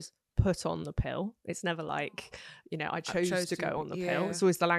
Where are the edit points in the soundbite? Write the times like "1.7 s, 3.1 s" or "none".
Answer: none